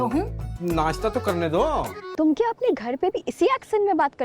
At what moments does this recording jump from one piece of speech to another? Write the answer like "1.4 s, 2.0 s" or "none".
2.0 s

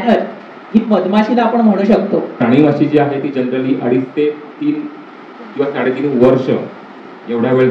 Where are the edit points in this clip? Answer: 2.4 s

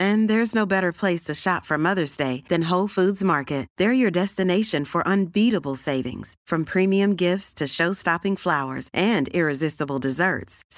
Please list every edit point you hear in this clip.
none

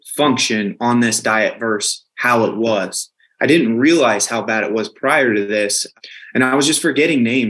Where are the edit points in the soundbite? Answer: none

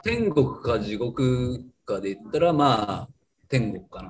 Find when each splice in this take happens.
none

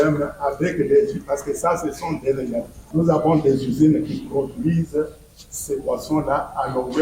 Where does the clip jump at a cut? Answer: 2.8 s

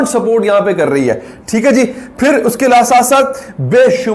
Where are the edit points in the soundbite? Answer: none

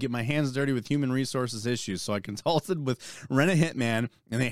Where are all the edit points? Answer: none

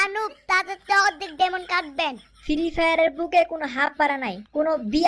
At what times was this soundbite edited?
none

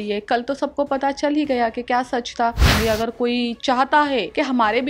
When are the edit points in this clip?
2.7 s

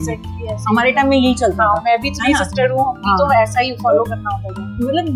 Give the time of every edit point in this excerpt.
none

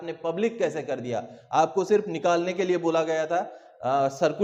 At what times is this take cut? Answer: none

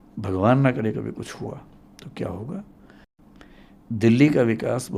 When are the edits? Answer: 3.2 s

